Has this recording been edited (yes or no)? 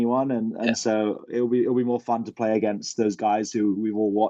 no